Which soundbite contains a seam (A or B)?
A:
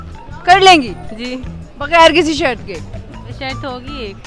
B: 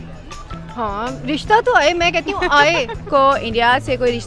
B